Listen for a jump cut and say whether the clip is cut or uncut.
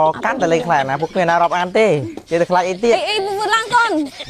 uncut